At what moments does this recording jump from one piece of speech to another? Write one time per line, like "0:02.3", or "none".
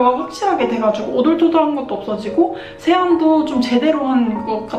none